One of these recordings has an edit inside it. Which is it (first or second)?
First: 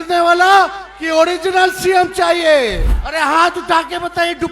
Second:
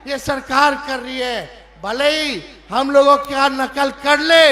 first